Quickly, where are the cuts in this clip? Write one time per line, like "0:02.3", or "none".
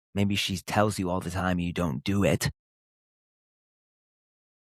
none

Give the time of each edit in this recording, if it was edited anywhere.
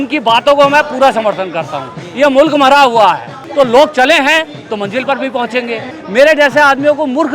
0:03.4
0:05.9

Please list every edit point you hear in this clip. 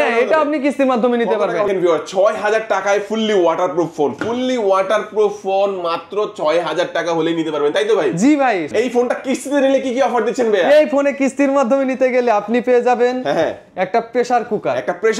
0:01.7
0:08.6

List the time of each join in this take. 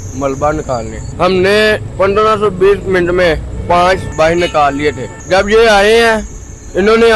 0:01.0
0:01.9
0:04.1
0:05.1

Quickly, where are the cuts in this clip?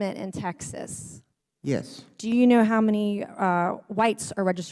0:02.3

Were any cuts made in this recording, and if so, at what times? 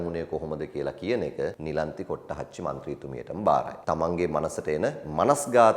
0:01.6
0:03.7

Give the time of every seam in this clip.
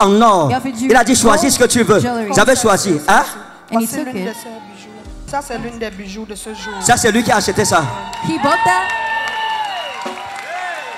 0:05.1

